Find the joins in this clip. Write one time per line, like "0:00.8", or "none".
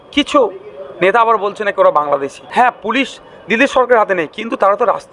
0:02.4